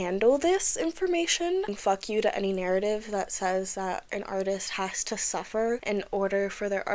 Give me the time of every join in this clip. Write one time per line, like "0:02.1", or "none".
0:01.8
0:05.8